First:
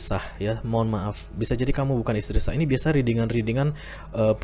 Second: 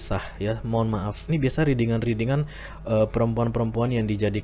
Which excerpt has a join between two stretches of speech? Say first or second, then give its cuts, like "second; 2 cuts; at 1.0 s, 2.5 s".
second; 1 cut; at 1.2 s